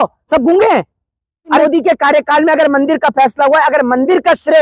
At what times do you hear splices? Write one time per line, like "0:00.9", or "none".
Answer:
0:01.6